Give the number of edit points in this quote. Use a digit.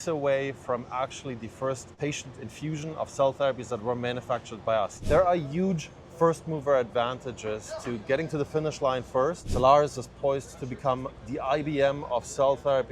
3